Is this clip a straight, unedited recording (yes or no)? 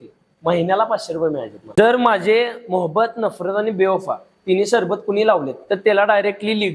no